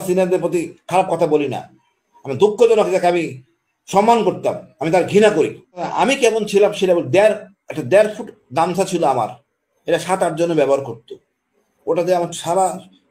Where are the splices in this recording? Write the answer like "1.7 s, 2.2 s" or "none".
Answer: 5.9 s